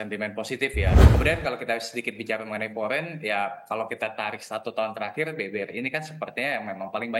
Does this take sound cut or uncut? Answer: cut